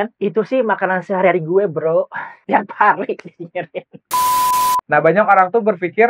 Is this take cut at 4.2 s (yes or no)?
yes